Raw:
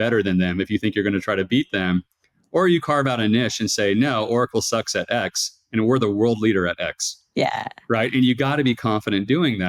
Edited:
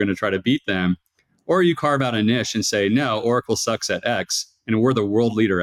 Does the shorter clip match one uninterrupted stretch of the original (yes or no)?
yes